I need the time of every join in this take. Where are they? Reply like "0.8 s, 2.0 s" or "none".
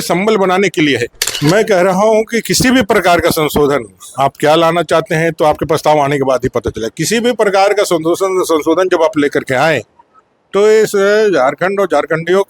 1.2 s